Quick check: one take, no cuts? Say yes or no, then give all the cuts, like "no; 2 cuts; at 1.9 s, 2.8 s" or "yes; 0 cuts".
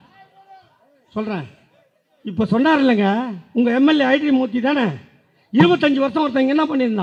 yes; 0 cuts